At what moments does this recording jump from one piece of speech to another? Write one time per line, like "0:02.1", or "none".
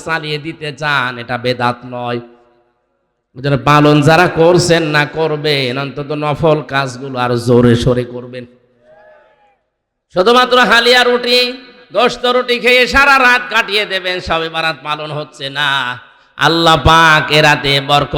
none